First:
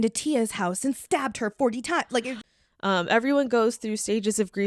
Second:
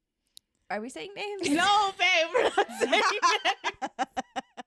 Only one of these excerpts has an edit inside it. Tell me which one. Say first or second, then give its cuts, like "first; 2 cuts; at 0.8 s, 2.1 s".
first; 1 cut; at 2.3 s